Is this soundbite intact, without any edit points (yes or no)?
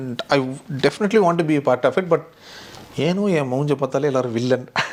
yes